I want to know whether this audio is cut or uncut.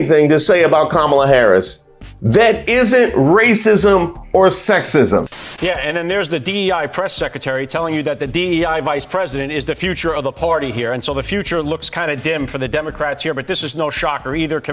cut